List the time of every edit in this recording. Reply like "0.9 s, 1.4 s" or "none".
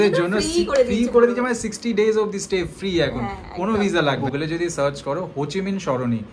4.2 s